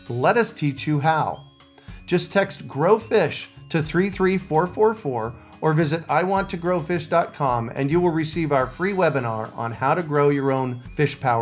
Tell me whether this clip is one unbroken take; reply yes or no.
yes